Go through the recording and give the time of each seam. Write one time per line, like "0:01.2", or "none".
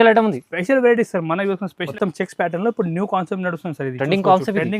0:01.8